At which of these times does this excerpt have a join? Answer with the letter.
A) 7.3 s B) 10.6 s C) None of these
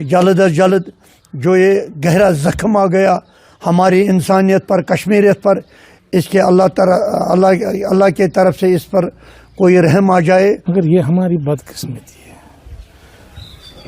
B